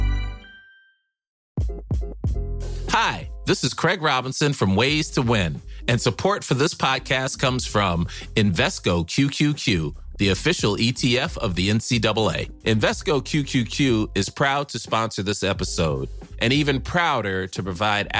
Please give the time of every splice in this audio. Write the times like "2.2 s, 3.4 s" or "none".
1.4 s